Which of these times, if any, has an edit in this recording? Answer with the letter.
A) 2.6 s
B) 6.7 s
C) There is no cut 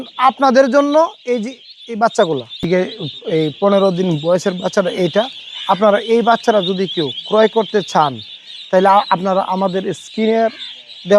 A